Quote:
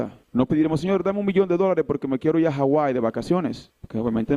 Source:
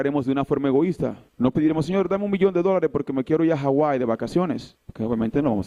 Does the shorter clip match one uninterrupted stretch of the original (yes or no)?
yes